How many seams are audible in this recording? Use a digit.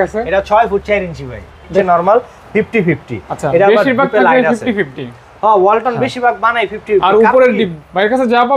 1